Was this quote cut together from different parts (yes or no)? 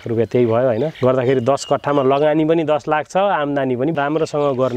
yes